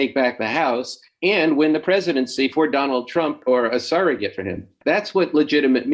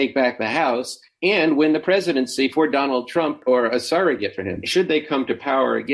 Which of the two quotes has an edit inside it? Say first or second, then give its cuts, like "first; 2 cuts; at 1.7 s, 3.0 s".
second; 1 cut; at 4.5 s